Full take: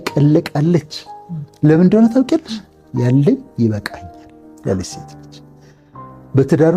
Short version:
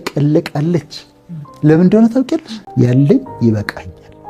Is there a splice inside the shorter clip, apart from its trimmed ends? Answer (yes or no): yes